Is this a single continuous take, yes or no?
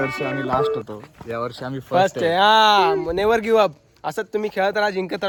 yes